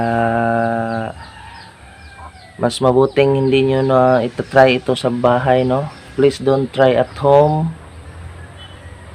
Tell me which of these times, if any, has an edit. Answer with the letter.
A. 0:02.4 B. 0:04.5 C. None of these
C